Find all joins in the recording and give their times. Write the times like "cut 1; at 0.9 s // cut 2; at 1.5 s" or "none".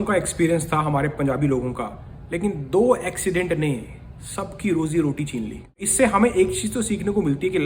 cut 1; at 5.8 s